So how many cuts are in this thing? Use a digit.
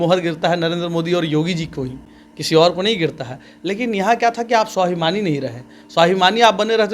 0